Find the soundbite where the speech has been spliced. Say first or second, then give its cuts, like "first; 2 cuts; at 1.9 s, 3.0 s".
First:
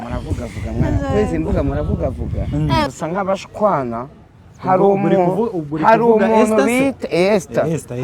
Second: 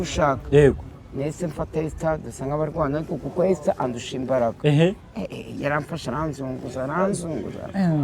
first; 1 cut; at 2.9 s